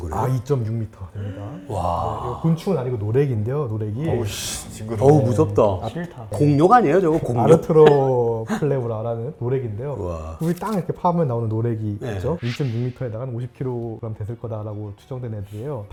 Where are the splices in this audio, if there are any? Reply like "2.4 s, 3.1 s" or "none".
none